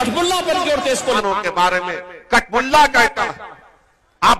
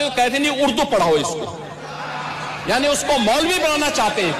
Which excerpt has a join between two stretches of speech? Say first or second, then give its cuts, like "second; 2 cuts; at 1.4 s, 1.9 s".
first; 1 cut; at 1.2 s